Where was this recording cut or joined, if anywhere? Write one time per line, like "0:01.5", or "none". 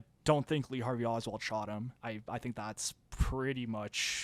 0:01.9